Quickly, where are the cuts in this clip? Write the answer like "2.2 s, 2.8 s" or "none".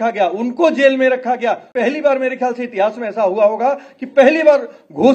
1.7 s

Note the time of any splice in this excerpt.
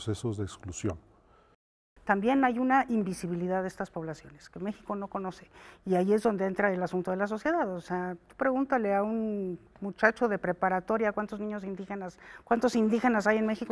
1.9 s

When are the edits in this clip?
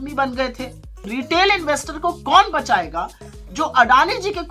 1.0 s

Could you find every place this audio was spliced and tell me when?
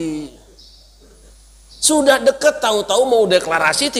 1.3 s

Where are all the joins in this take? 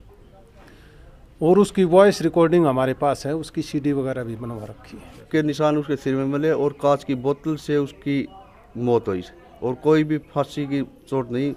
5.2 s

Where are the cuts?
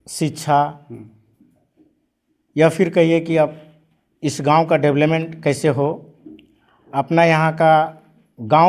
none

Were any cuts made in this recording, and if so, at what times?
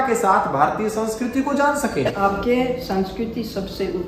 2.1 s

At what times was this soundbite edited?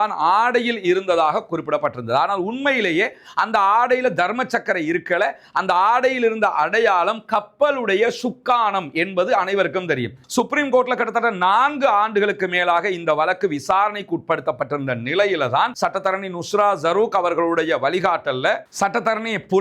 10.2 s, 15.7 s

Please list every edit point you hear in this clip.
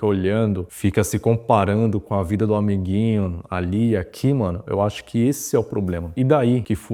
none

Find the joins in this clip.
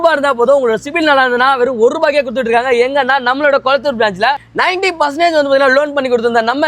none

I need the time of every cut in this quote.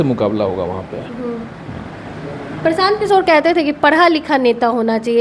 none

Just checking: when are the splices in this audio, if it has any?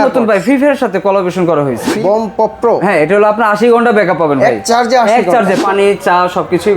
1.9 s, 5.6 s

